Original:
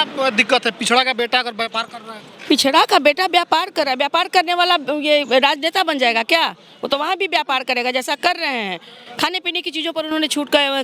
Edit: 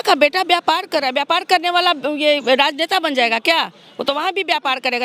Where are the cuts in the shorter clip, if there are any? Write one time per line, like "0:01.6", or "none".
none